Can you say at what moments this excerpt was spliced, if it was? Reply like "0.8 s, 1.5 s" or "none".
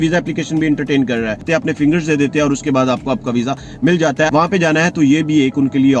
1.4 s, 4.3 s

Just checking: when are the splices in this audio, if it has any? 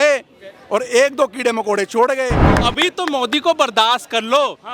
2.5 s

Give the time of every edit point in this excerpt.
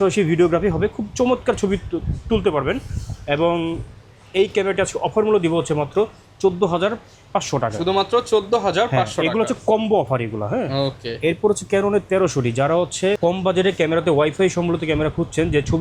none

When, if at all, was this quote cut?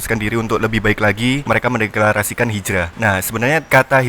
1.4 s, 3.2 s

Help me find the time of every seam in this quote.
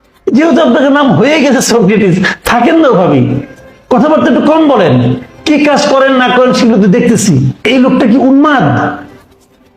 7.7 s

